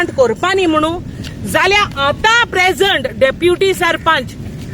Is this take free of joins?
no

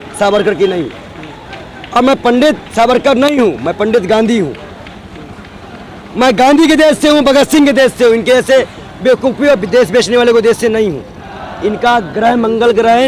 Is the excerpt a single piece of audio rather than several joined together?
yes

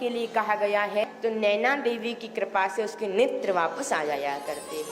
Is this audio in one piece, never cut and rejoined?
no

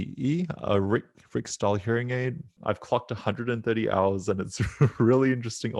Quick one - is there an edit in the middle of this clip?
yes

